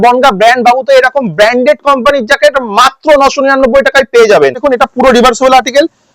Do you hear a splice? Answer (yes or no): yes